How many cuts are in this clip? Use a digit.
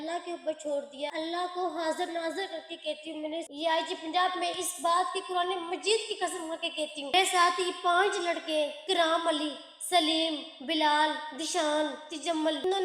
2